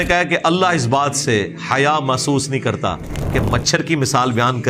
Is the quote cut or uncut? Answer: uncut